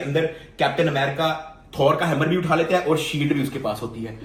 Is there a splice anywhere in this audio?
no; 0 cuts

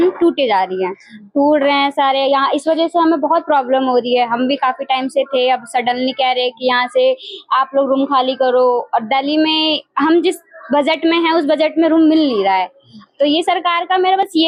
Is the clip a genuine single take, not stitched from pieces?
yes; 0 cuts

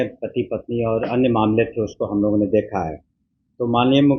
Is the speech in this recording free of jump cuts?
yes; 0 cuts

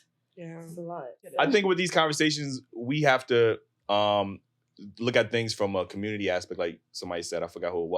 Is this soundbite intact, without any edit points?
no; 1 cut; at 1.2 s

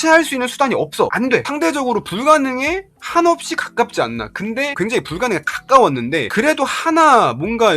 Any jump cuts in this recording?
yes; 1 cut; at 1.4 s

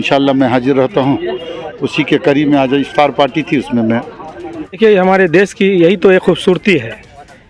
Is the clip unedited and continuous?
no; 1 cut; at 4.8 s

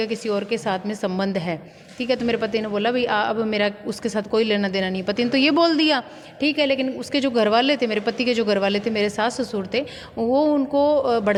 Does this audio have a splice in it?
no; 0 cuts

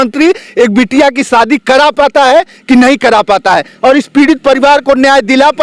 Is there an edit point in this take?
no; 0 cuts

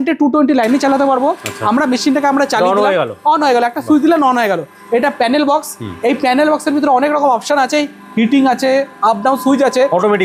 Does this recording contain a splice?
no; 0 cuts

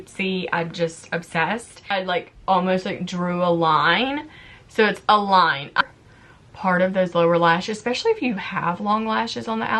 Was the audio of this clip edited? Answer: yes; 2 cuts; at 1.9 s, 5.8 s

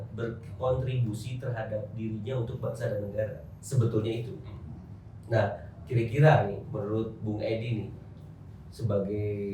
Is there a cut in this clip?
no; 0 cuts

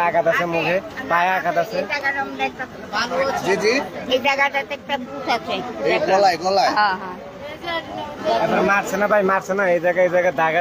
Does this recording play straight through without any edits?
yes; 0 cuts

